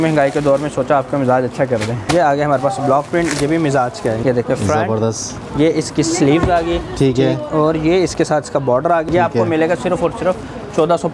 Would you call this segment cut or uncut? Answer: cut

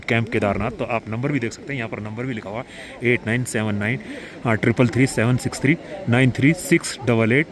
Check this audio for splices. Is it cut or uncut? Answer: uncut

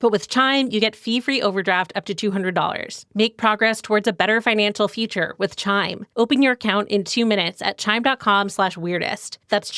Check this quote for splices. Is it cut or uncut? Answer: cut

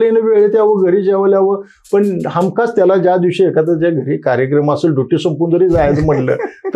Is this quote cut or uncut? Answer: uncut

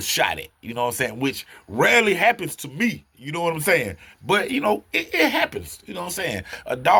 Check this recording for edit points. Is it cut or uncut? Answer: uncut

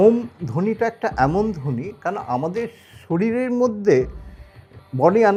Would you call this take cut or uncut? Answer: uncut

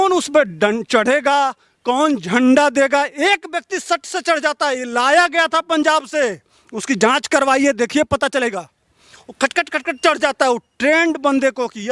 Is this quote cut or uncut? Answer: uncut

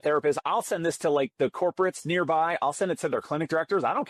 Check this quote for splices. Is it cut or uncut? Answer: uncut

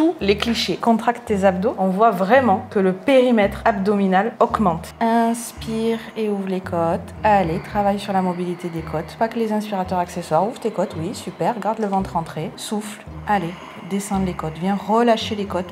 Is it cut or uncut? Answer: cut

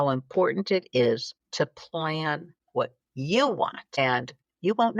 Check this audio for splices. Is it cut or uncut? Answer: cut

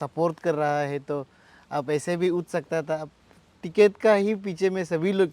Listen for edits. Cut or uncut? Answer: uncut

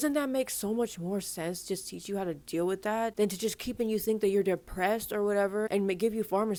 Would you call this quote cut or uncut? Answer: uncut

